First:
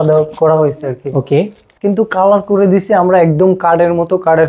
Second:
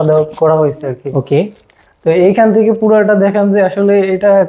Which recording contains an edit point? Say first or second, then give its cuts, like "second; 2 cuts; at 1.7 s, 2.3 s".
first; 1 cut; at 1.7 s